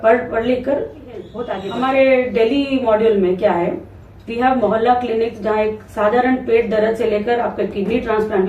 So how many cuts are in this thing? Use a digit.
1